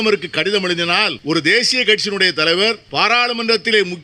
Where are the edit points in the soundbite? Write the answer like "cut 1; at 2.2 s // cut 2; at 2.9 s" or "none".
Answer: cut 1; at 1.2 s // cut 2; at 2.8 s